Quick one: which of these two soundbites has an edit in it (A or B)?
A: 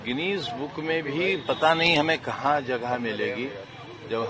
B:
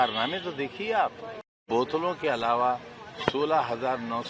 B